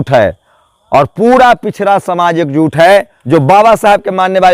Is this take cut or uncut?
cut